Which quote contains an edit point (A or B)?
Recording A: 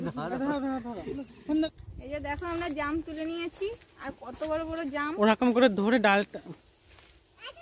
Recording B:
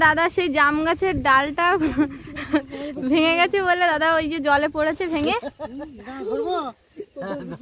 A